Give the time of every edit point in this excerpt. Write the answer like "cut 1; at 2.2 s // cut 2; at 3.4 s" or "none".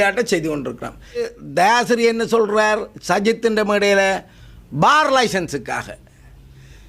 cut 1; at 1.3 s